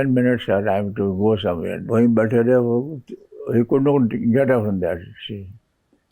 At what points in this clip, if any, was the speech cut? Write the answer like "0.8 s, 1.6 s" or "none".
1.8 s

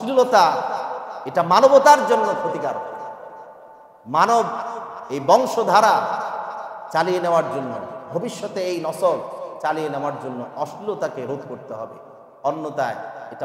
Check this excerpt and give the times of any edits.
none

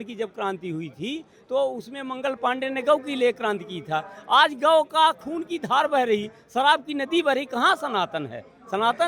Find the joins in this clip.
none

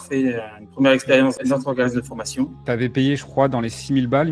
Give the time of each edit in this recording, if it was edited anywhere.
1.4 s, 2.6 s

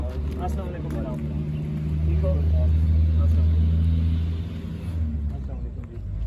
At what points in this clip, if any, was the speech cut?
none

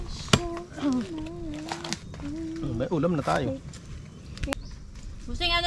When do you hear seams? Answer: 4.5 s

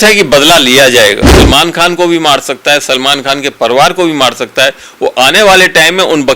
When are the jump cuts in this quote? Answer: 1.4 s

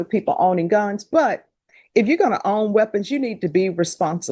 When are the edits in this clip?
none

